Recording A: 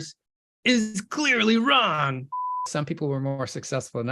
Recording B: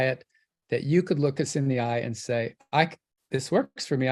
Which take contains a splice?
A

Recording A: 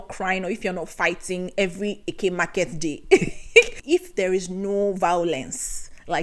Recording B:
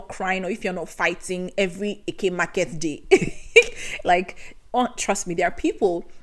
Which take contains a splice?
A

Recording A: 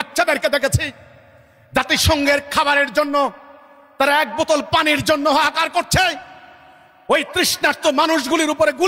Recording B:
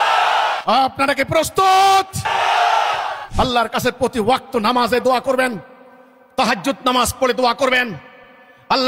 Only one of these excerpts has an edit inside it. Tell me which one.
B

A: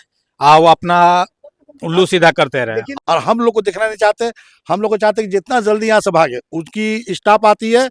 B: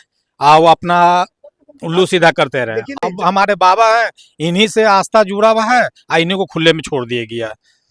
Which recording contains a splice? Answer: A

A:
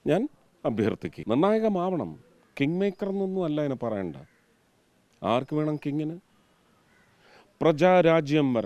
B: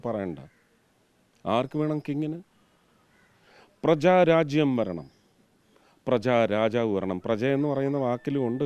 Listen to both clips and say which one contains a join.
A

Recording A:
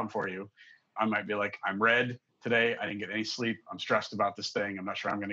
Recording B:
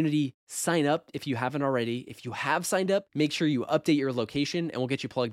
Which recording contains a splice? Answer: A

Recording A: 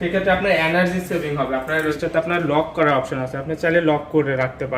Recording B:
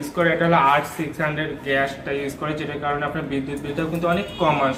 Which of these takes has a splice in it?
A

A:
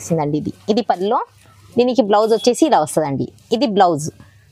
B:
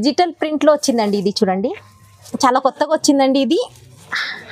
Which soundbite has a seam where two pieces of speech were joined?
B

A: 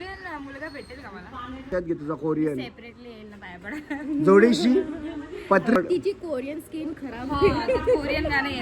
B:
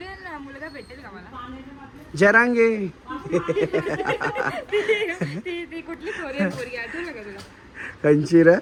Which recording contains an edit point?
A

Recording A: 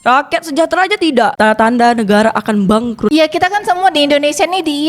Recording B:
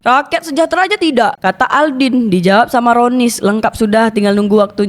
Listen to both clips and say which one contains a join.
A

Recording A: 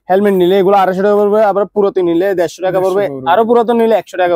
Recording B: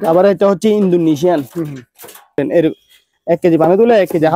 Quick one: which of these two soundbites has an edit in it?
B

